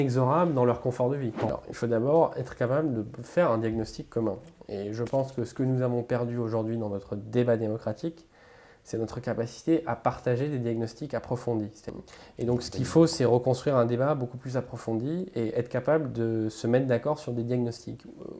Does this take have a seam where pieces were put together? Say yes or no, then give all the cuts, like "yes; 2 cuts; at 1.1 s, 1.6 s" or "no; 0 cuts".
yes; 2 cuts; at 1.5 s, 11.9 s